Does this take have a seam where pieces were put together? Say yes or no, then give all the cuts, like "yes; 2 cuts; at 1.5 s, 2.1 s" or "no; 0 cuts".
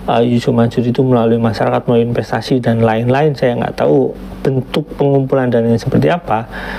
no; 0 cuts